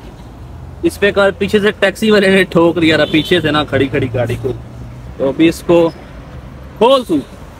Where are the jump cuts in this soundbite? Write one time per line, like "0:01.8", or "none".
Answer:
none